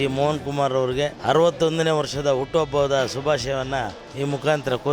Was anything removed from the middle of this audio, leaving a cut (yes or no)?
yes